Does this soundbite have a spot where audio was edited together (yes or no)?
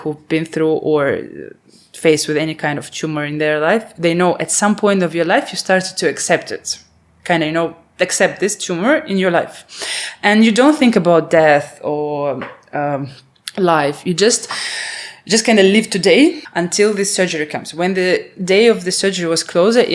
yes